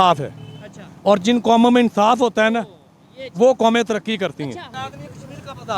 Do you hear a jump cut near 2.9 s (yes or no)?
no